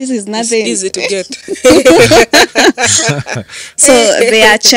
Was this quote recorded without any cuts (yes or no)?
yes